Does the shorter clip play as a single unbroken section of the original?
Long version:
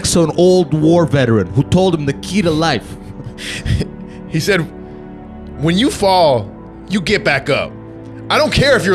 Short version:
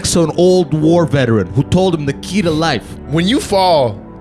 no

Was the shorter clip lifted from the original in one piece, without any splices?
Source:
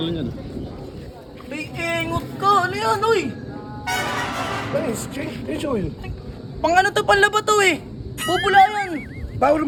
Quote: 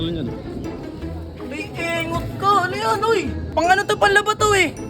no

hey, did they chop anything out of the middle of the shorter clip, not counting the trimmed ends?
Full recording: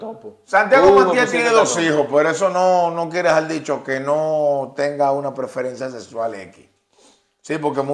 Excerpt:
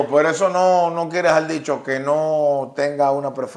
no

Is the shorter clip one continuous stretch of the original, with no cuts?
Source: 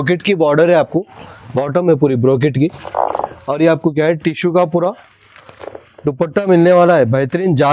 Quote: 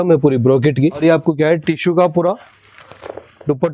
no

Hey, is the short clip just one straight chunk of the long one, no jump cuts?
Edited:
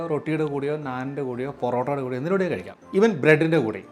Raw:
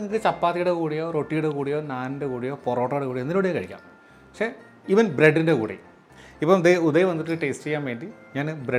no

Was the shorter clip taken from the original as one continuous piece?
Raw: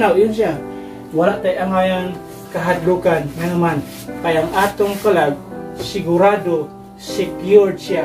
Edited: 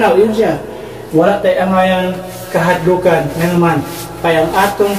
yes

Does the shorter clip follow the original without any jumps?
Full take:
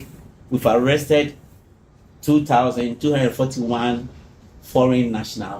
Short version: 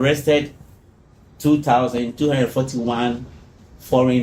yes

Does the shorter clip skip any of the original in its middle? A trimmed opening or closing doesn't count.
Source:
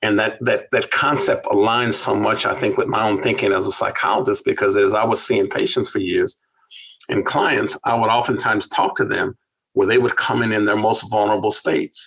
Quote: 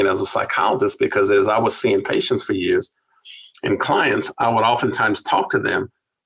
no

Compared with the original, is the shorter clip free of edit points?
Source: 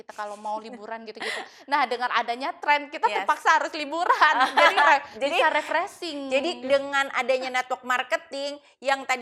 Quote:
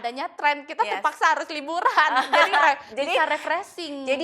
yes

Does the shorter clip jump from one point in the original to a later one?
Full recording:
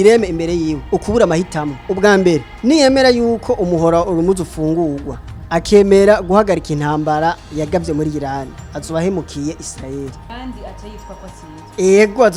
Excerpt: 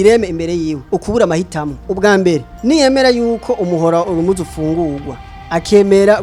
no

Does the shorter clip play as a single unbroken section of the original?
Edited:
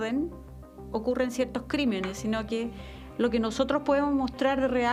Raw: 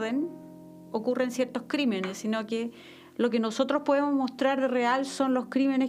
yes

